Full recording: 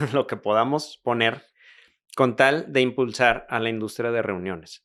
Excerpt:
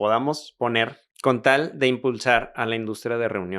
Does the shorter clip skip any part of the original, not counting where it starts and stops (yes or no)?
yes